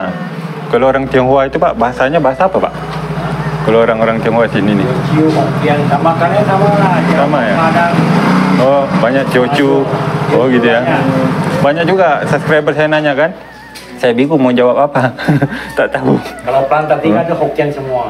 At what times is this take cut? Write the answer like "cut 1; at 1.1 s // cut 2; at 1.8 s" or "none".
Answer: none